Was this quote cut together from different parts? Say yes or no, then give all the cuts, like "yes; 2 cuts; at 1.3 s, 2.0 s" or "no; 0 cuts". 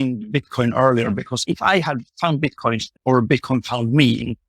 yes; 2 cuts; at 1.4 s, 2.9 s